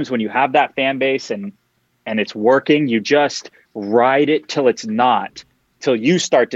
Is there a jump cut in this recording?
no; 0 cuts

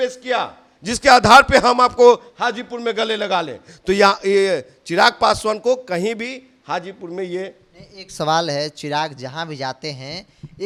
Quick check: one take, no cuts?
yes; 0 cuts

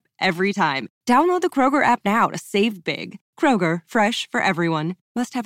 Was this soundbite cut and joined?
no; 0 cuts

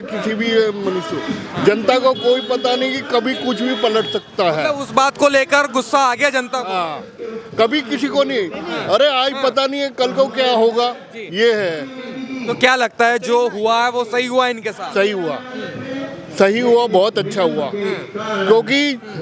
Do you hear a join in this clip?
no; 0 cuts

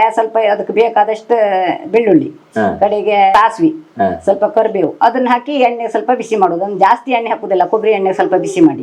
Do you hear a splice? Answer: yes; 2 cuts; at 3.3 s, 4.9 s

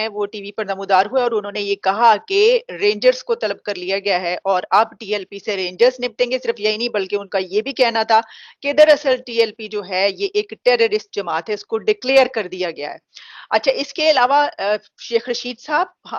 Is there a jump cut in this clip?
no; 0 cuts

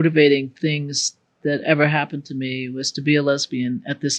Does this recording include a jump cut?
no; 0 cuts

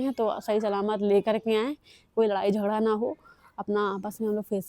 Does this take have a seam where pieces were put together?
no; 0 cuts

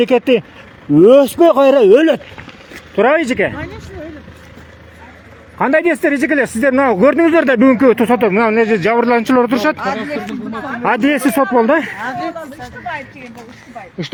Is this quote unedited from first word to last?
yes; 0 cuts

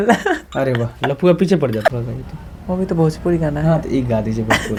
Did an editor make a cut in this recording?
no; 0 cuts

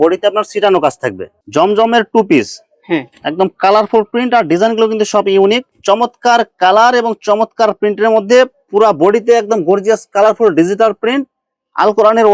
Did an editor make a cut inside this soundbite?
yes; 2 cuts; at 1.4 s, 5.7 s

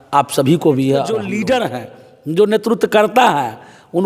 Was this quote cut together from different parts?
yes; 1 cut; at 1.3 s

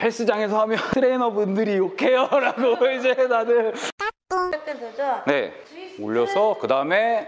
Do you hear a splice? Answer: yes; 1 cut; at 4.6 s

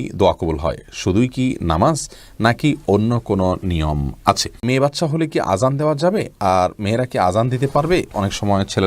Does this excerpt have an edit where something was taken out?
yes; 1 cut; at 4.6 s

